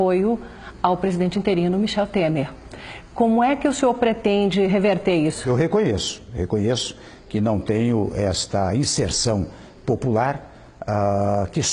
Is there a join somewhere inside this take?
yes; 1 cut; at 5.4 s

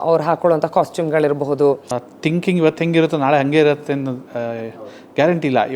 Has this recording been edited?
yes; 1 cut; at 1.9 s

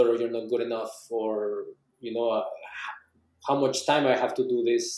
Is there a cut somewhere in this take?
no; 0 cuts

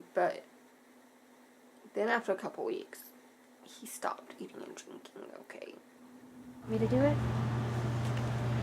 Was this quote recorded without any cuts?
no; 1 cut; at 6.7 s

